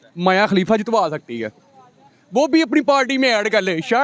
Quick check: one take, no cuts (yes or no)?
yes